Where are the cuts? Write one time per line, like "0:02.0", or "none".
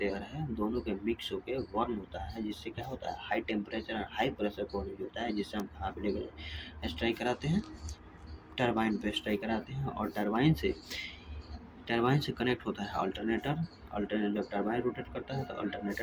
none